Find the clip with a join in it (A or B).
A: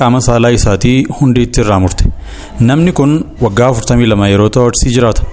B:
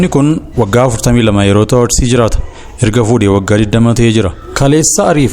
B